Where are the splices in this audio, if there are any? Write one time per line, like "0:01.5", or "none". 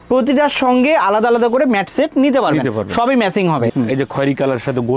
0:03.7